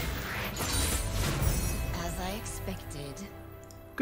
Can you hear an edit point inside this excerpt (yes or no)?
no